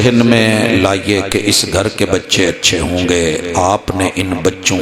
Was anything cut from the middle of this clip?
no; 0 cuts

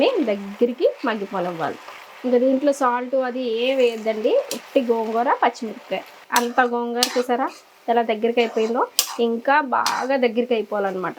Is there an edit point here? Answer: no; 0 cuts

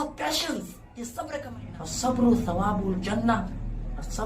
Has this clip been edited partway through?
yes; 1 cut; at 1.6 s

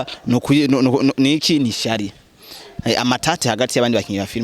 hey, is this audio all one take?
no; 1 cut; at 2.7 s

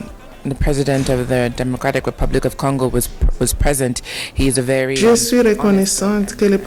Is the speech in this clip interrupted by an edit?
no; 0 cuts

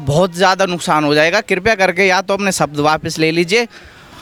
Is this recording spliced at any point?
no; 0 cuts

